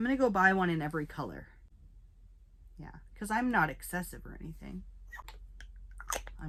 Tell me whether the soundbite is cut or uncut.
uncut